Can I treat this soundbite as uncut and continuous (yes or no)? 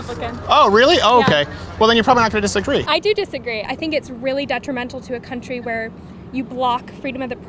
no